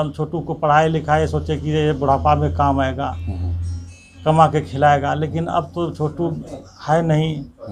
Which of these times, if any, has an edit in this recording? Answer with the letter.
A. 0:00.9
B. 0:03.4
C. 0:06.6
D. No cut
D